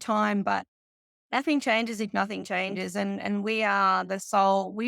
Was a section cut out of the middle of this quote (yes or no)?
no